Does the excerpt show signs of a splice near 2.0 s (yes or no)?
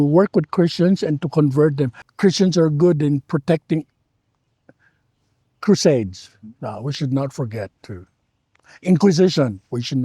yes